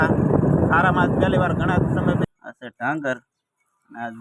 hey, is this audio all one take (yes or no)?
no